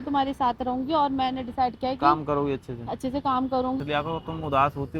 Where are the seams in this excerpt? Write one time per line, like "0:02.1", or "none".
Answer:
0:03.8